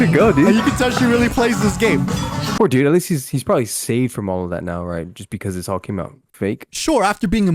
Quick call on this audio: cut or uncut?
cut